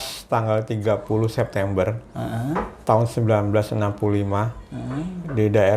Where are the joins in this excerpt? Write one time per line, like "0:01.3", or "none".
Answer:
none